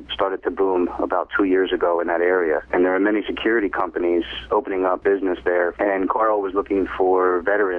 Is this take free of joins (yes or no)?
yes